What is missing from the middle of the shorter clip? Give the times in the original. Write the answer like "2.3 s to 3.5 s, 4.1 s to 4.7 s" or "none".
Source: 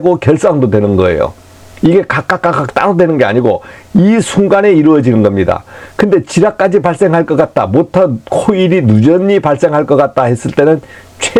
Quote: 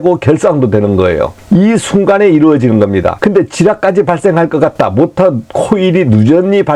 1.3 s to 3.8 s, 5.6 s to 5.9 s